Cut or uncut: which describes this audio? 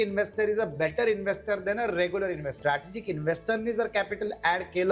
cut